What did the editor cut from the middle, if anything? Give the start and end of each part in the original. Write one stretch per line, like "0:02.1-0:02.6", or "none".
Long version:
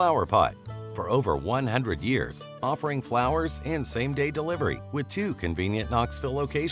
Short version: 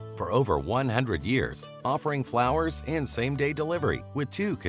none